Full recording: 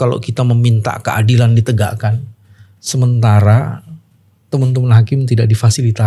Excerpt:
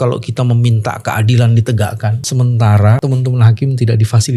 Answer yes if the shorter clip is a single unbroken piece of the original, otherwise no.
no